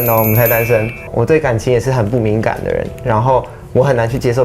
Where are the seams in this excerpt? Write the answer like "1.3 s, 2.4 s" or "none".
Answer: 1.1 s

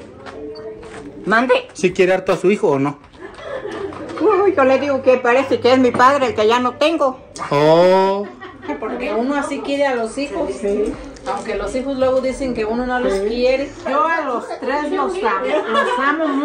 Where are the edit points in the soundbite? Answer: 8.7 s, 13.8 s

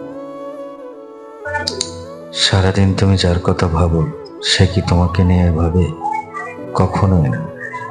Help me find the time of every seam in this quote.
none

